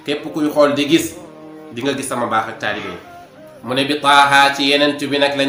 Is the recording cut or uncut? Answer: uncut